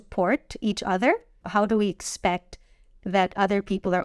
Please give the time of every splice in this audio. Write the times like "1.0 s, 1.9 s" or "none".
1.4 s